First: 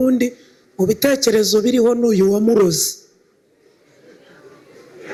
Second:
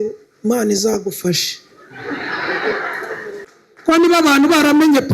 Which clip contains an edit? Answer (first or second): second